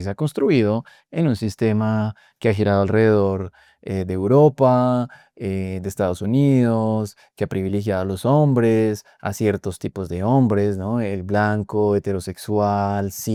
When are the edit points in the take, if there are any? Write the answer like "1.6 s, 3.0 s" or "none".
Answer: none